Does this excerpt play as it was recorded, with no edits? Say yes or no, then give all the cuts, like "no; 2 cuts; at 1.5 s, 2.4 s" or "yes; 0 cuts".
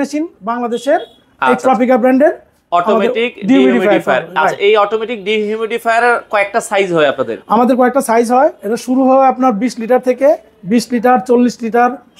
yes; 0 cuts